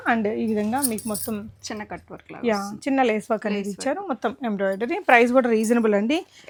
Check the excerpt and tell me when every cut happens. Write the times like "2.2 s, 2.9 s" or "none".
none